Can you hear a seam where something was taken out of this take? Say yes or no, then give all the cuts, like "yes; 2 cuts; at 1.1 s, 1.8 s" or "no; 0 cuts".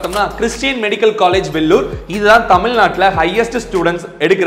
no; 0 cuts